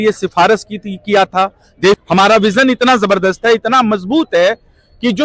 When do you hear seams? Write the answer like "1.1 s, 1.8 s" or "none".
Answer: 2.0 s